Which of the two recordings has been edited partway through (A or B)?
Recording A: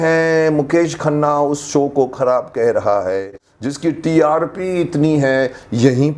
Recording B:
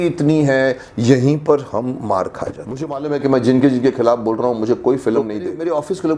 B